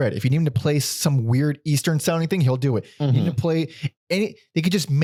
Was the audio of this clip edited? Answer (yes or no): no